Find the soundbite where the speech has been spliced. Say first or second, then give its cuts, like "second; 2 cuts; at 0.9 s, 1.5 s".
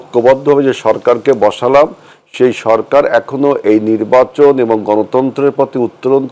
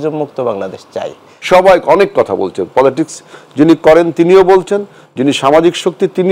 second; 1 cut; at 1.3 s